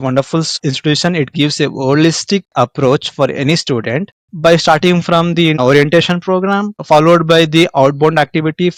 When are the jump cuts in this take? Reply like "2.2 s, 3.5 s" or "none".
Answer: none